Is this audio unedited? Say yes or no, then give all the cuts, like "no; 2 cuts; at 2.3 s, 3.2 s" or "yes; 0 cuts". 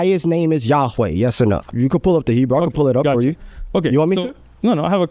no; 1 cut; at 1.7 s